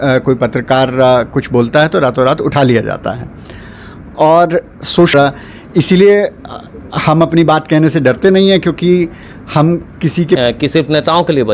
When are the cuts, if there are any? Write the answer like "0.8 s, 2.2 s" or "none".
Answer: 5.1 s, 10.4 s